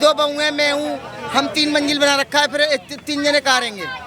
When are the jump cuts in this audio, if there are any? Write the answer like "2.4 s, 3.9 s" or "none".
none